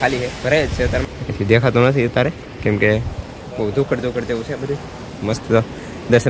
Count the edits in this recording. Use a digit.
1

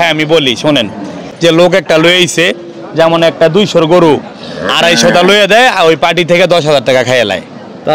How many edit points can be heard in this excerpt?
1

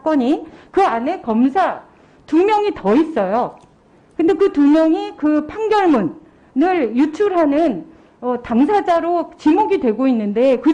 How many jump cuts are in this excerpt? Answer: 0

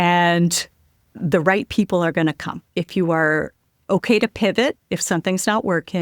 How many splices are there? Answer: 1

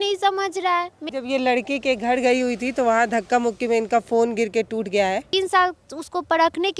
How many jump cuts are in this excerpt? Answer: 2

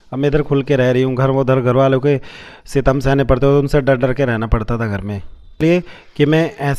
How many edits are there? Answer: 1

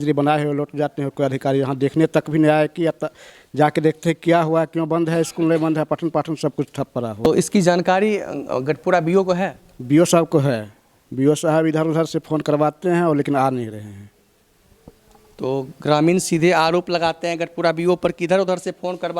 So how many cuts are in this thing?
0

